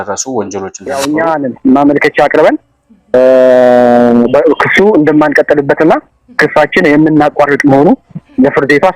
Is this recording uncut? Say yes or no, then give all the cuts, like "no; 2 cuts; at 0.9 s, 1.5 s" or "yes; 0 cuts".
no; 1 cut; at 1.0 s